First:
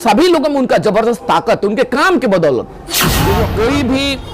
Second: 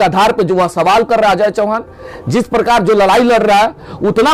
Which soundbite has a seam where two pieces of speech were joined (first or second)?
first